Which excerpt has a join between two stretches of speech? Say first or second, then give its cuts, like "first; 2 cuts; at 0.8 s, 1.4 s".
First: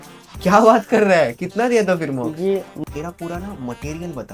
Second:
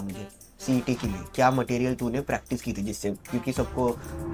first; 1 cut; at 2.7 s